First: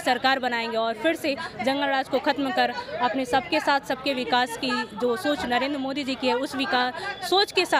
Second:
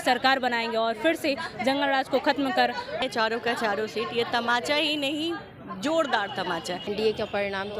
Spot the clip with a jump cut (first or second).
second